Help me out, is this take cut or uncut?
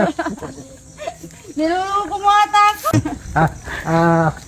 cut